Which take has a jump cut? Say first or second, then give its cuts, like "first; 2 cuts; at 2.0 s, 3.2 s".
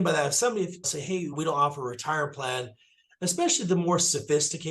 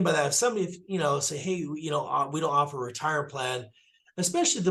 first; 1 cut; at 1.2 s